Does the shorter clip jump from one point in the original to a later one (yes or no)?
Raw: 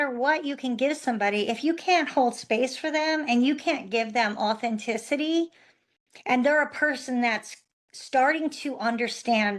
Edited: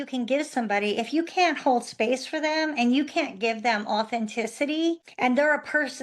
yes